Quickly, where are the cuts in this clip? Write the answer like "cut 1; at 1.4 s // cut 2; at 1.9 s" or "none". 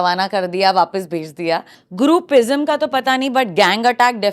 cut 1; at 1.8 s